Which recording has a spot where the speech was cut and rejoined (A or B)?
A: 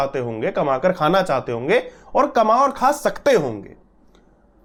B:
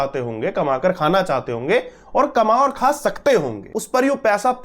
B